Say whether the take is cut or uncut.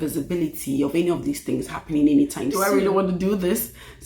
cut